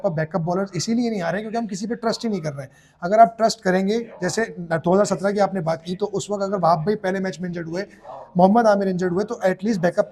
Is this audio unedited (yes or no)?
yes